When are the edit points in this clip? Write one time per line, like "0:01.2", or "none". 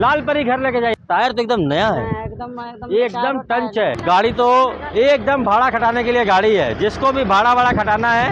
0:01.0
0:04.0